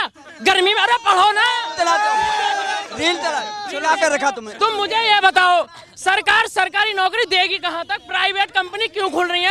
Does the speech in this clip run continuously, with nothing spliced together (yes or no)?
yes